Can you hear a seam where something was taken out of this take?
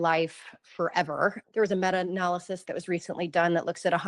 yes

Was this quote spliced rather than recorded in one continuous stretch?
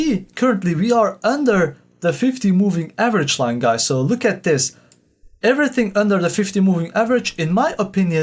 no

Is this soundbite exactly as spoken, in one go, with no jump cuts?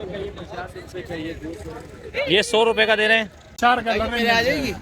no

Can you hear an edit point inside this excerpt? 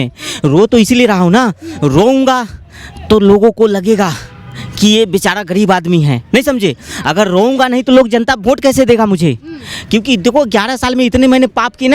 no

